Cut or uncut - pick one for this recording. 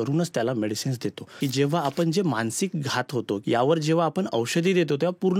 cut